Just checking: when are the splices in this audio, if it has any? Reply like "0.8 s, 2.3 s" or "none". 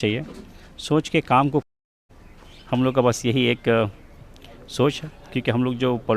1.7 s